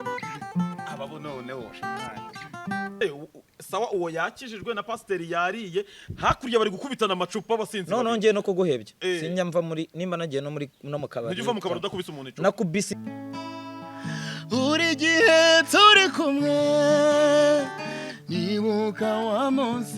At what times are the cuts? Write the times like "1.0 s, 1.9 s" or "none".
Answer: 3.0 s, 12.9 s